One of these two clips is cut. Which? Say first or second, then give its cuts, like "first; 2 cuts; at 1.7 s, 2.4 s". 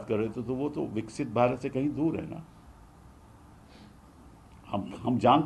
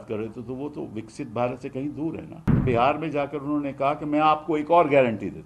second; 1 cut; at 2.6 s